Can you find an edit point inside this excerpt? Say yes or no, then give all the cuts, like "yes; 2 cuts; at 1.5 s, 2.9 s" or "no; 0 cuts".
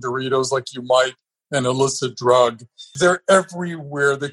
yes; 1 cut; at 2.9 s